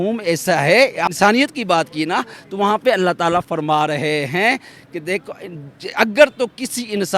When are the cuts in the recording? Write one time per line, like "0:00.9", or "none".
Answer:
0:01.1

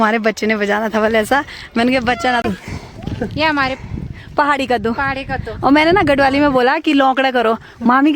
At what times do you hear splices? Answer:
0:02.4

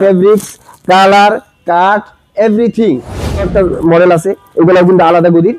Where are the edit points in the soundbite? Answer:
0:03.5

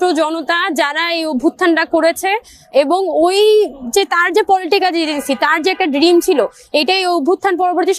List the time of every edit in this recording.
none

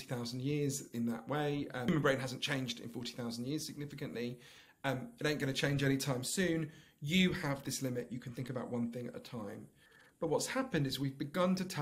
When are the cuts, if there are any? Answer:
0:01.9

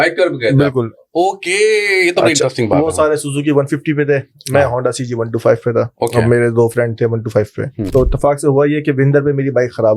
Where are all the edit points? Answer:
0:07.9

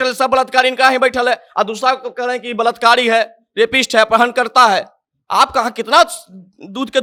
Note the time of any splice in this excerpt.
none

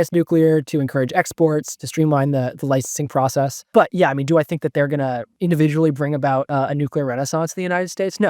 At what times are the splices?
0:01.8
0:03.7
0:05.3

